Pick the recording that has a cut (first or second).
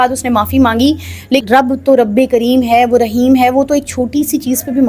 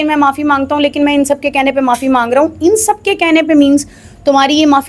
first